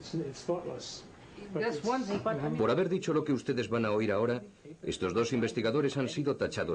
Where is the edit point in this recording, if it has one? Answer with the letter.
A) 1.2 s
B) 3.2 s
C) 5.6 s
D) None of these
C